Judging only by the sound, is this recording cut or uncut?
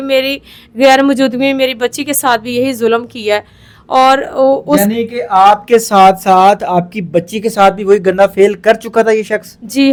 uncut